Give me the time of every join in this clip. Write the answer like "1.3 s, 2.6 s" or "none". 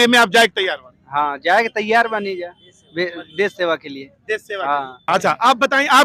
5.1 s